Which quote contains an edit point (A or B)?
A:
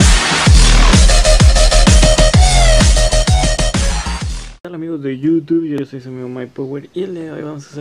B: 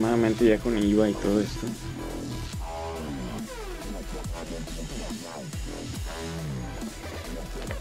B